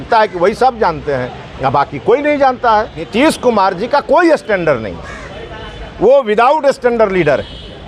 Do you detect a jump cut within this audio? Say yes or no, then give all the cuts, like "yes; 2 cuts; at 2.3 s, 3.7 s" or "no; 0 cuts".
yes; 1 cut; at 3.1 s